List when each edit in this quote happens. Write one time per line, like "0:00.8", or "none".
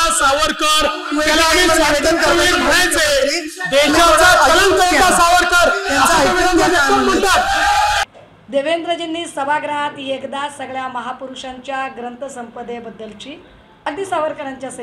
0:08.0